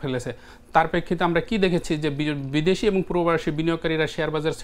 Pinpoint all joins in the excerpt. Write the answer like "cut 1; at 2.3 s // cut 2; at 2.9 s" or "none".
none